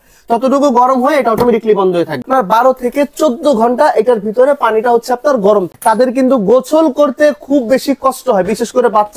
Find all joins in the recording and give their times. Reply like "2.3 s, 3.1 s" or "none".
2.2 s, 5.7 s